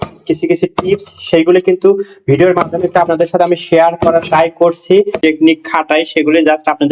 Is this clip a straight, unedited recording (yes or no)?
no